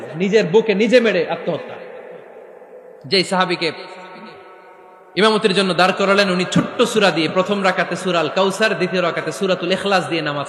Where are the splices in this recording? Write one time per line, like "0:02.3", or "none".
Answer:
none